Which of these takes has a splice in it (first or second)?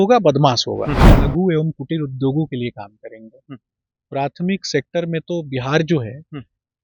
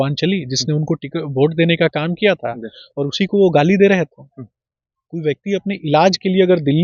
first